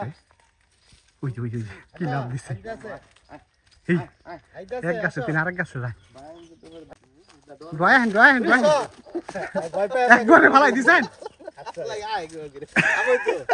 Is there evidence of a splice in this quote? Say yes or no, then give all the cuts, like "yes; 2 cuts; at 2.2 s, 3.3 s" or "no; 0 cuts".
yes; 1 cut; at 6.9 s